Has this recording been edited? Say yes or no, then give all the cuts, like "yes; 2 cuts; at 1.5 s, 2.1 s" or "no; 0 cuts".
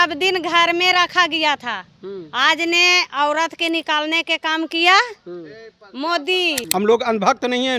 yes; 1 cut; at 6.6 s